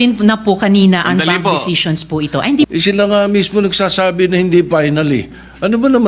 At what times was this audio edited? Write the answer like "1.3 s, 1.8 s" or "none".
2.7 s